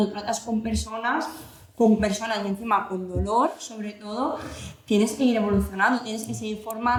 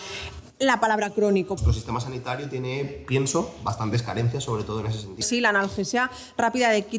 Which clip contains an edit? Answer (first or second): second